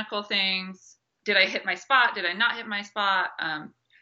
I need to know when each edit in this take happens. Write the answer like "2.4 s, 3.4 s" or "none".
1.1 s